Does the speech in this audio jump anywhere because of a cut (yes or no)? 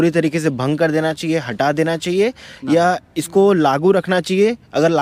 no